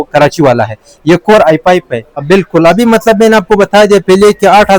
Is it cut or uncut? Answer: cut